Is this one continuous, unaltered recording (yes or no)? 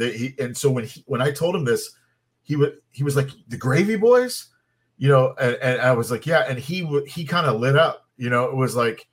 yes